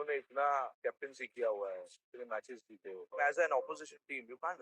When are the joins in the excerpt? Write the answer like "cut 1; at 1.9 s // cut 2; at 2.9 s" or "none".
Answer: cut 1; at 0.8 s // cut 2; at 3.1 s